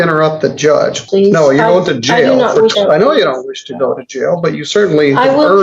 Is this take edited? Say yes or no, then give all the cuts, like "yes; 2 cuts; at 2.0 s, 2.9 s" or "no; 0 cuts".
yes; 2 cuts; at 1.0 s, 2.7 s